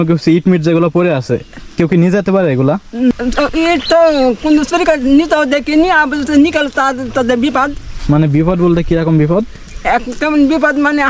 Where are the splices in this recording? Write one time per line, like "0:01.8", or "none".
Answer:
0:03.1